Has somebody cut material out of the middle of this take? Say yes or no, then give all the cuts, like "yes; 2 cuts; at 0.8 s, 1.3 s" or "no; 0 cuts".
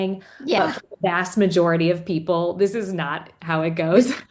no; 0 cuts